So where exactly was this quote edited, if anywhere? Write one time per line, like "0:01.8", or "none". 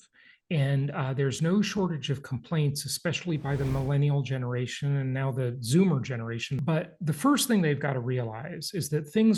0:06.5